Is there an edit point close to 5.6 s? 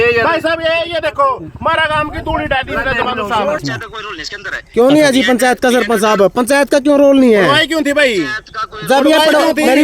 no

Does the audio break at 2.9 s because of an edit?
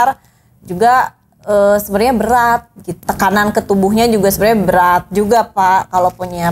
yes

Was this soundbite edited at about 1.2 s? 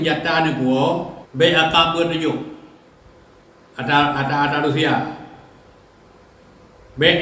yes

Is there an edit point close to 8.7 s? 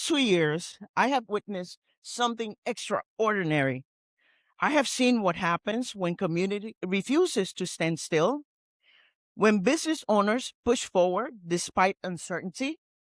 no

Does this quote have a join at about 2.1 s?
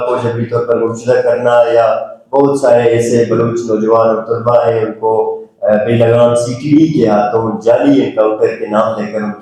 no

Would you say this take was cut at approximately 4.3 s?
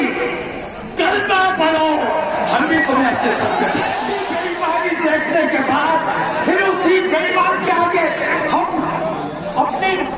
yes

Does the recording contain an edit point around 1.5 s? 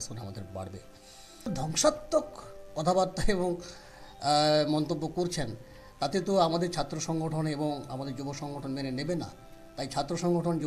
yes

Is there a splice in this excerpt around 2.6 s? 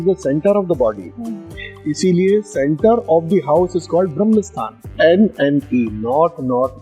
no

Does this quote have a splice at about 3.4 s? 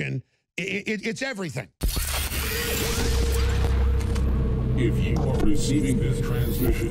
no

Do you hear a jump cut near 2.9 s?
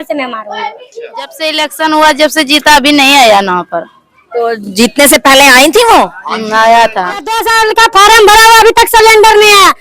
no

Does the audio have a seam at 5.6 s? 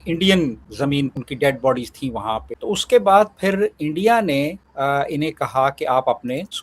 no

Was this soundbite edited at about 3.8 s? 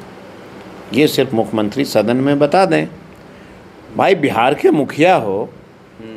no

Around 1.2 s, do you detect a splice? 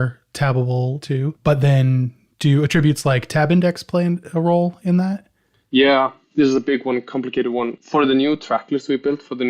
yes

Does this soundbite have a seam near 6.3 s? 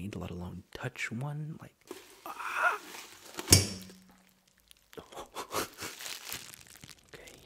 yes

